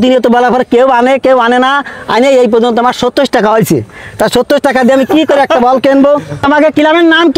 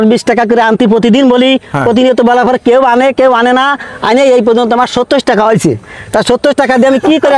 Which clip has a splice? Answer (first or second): first